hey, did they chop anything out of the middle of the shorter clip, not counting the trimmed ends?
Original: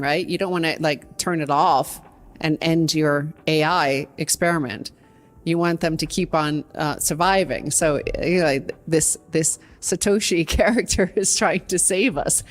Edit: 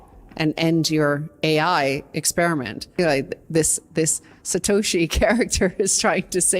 yes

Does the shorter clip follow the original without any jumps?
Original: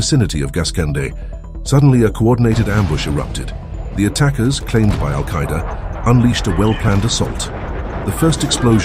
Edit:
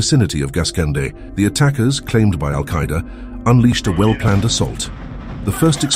no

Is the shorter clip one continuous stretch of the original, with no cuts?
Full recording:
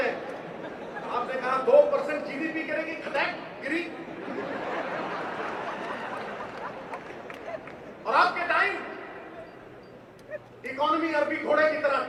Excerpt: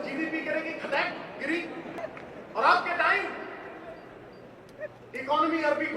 no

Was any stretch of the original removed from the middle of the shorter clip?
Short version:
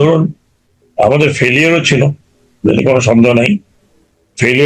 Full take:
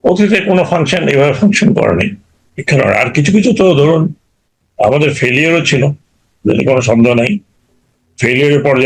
no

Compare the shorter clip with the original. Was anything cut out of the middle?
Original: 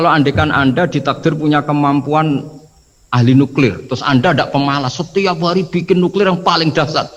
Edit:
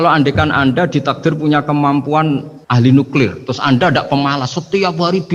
yes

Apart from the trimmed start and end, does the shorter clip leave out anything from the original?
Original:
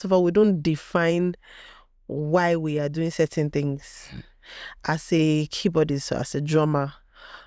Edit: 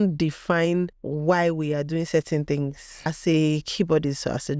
yes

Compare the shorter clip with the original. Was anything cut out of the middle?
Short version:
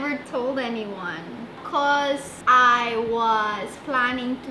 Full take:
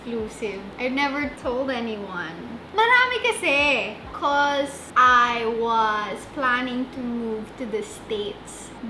yes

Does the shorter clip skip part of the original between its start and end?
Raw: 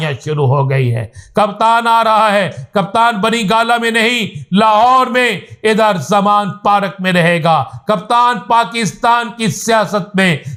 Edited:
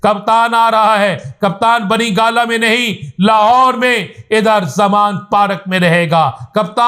no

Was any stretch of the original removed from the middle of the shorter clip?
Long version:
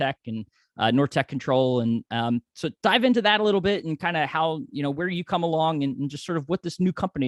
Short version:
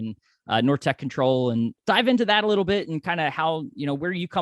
yes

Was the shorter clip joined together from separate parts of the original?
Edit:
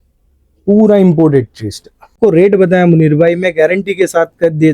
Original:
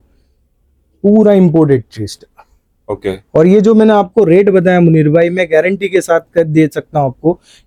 yes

